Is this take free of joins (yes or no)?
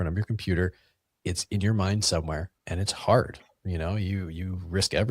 no